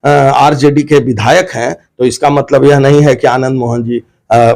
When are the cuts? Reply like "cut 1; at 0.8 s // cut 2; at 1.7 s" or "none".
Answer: none